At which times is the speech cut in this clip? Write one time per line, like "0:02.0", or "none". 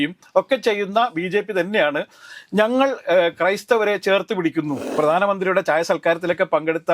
0:04.9